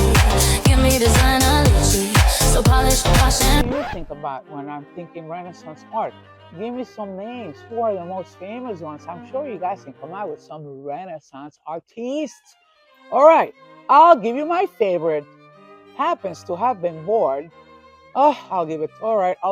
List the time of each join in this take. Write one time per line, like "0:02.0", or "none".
0:03.6